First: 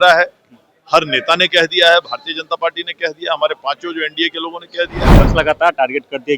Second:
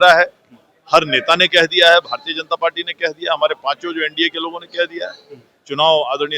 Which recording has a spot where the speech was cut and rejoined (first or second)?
first